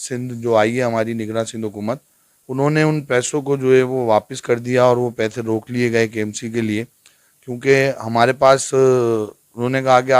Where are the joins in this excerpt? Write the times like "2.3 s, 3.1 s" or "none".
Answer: none